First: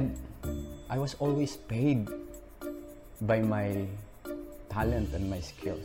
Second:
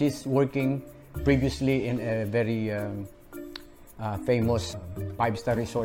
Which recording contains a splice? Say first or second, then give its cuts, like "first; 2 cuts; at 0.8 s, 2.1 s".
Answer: second; 1 cut; at 4.7 s